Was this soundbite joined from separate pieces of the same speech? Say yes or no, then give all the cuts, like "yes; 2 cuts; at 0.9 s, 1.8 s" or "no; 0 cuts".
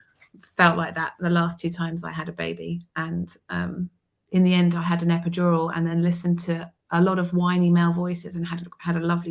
no; 0 cuts